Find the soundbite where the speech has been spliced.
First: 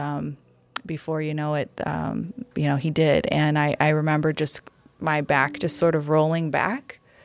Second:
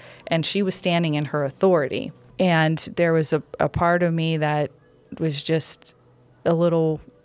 second; 1 cut; at 2.2 s

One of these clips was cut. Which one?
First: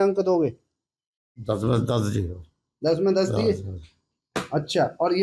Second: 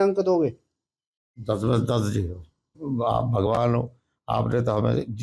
second; 1 cut; at 2.7 s

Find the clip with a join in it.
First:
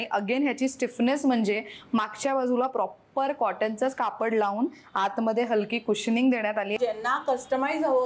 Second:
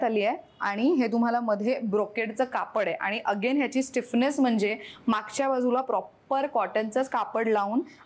first; 1 cut; at 6.8 s

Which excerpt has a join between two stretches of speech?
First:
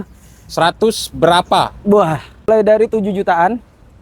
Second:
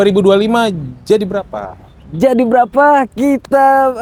first; 1 cut; at 2.5 s

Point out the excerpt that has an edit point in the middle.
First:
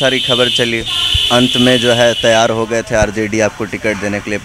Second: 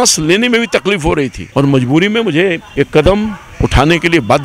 second; 2 cuts; at 1.4 s, 2.6 s

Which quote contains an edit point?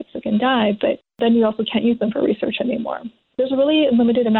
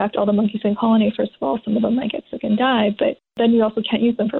first; 1 cut; at 3.3 s

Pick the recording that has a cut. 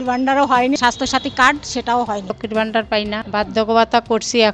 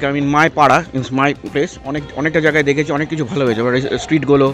first; 3 cuts; at 0.8 s, 2.3 s, 3.2 s

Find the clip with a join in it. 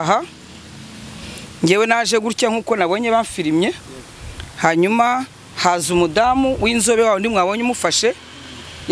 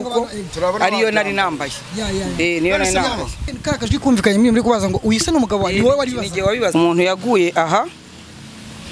second; 2 cuts; at 3.5 s, 6.7 s

